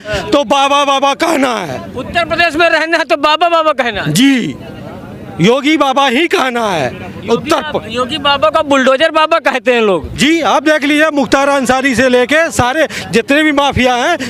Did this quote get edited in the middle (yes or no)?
no